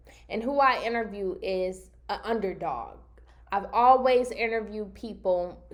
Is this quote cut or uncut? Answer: uncut